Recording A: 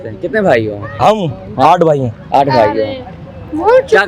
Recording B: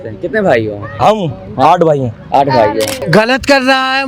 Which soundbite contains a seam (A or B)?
B